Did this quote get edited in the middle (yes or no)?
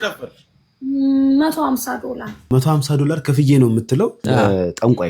yes